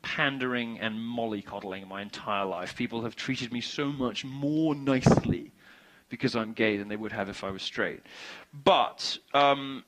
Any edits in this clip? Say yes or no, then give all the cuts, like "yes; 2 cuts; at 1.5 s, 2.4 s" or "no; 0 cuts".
no; 0 cuts